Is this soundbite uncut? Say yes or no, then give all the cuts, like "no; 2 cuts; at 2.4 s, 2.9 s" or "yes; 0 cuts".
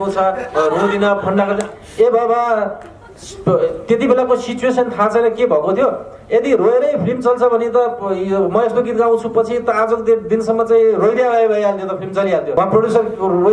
yes; 0 cuts